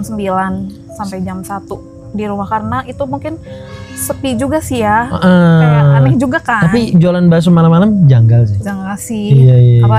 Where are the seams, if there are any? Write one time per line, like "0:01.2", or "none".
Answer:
none